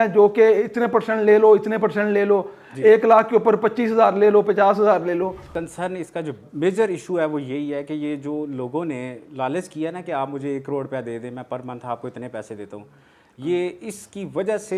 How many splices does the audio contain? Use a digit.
1